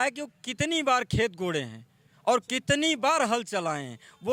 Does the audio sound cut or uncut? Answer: uncut